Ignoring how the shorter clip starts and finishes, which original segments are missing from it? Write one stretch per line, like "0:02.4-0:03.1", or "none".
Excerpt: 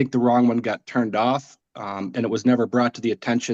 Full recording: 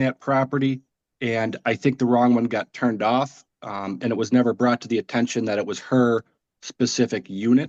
none